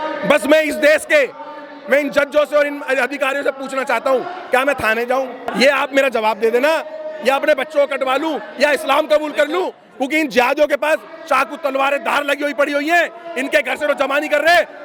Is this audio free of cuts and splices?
yes; 0 cuts

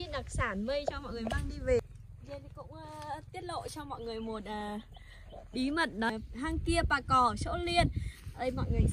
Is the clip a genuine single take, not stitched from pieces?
no; 2 cuts; at 1.8 s, 6.1 s

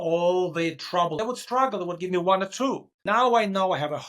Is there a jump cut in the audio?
yes; 2 cuts; at 1.2 s, 2.9 s

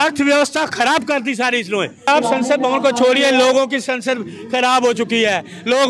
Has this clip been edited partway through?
yes; 1 cut; at 2.1 s

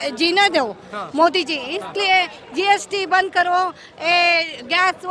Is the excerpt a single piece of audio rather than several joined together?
yes; 0 cuts

